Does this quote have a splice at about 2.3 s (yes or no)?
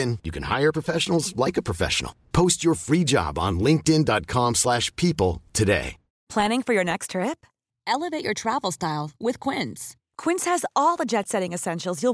no